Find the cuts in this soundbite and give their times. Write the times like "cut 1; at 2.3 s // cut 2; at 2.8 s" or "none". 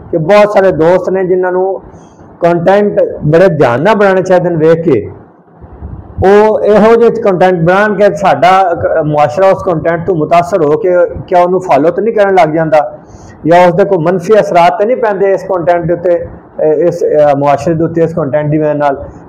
none